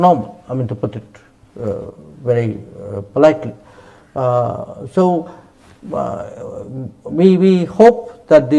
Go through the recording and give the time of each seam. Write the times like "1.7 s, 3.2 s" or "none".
none